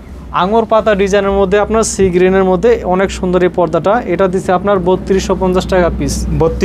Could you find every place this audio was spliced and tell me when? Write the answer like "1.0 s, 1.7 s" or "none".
none